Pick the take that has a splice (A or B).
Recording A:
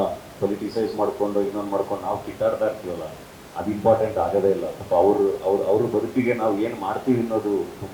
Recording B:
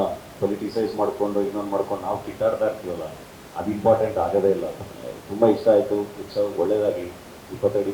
B